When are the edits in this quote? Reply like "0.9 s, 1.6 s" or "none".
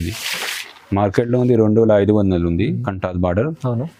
none